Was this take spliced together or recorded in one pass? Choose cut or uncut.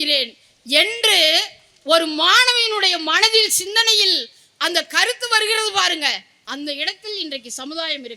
cut